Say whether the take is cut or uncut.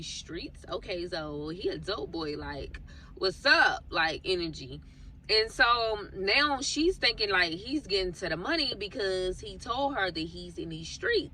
uncut